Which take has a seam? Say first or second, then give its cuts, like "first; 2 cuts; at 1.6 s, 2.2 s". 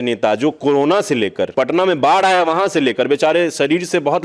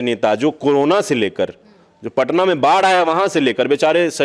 first; 1 cut; at 1.5 s